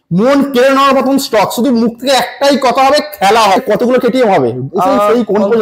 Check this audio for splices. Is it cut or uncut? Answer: cut